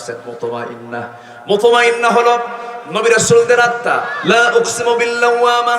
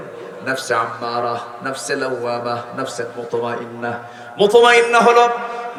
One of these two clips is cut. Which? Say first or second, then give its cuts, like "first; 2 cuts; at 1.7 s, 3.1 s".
first; 1 cut; at 4.1 s